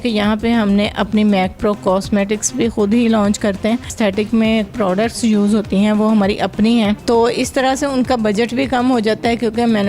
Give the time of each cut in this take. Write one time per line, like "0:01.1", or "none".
0:03.9
0:07.0